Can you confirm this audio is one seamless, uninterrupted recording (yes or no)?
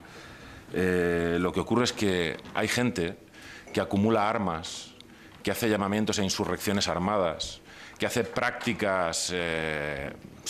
yes